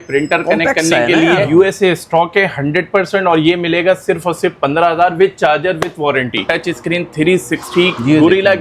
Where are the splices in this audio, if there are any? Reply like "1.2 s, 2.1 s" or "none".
1.4 s, 6.5 s